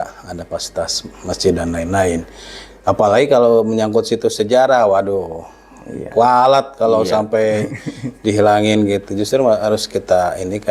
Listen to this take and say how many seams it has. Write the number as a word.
zero